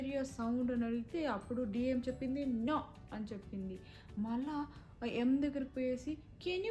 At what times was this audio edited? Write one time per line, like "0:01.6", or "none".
none